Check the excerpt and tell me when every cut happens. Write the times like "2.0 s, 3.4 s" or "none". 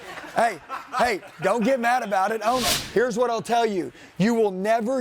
2.8 s